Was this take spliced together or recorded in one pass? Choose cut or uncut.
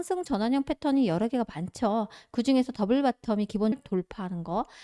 cut